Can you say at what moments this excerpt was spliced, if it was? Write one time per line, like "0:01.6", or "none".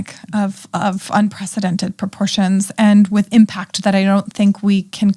none